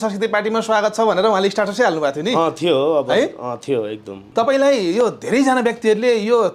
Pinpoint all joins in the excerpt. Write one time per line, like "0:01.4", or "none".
0:04.2

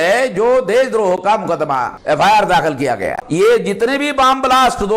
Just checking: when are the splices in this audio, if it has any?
0:01.9
0:03.2

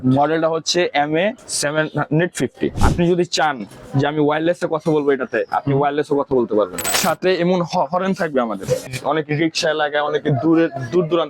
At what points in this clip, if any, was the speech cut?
0:01.5
0:02.8
0:07.0
0:08.9

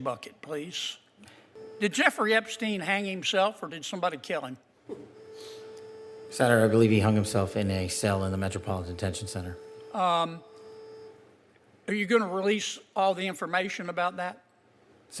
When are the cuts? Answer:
0:01.6

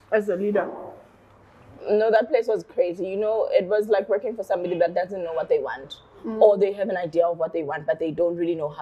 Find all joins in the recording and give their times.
none

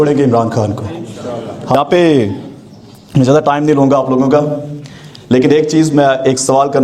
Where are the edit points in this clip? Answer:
0:01.7

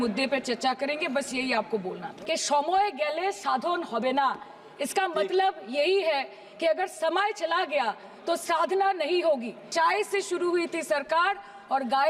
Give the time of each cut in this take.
0:02.1
0:09.6

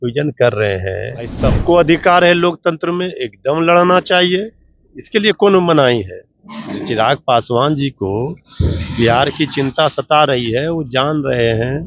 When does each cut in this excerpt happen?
0:01.4

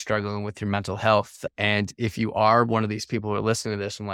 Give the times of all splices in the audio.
0:01.4

